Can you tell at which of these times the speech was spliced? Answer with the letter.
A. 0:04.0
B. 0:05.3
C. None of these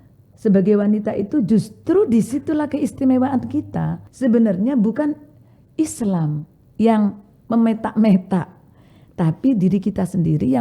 A